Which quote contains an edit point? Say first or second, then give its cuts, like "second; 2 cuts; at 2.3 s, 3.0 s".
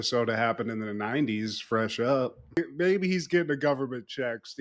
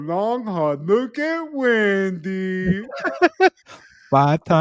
first; 1 cut; at 2.6 s